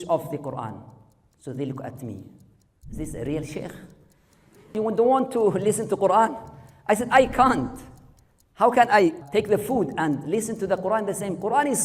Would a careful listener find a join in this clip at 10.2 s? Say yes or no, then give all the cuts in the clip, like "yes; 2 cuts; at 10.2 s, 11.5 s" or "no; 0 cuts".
yes; 3 cuts; at 4.7 s, 9.2 s, 10.2 s